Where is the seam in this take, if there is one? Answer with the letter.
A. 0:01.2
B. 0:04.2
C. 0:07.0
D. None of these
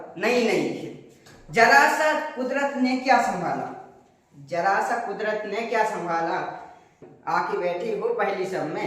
C